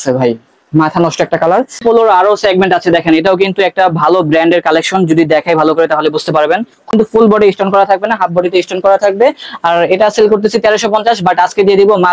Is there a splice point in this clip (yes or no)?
yes